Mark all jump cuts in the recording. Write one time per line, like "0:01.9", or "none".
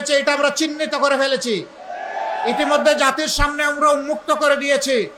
none